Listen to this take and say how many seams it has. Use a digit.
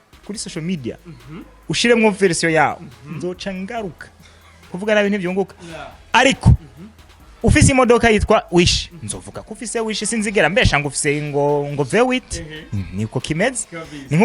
1